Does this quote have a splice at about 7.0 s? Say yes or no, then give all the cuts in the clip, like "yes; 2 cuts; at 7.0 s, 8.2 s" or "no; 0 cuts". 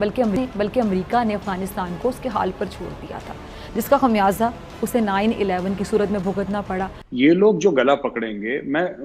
yes; 1 cut; at 7.0 s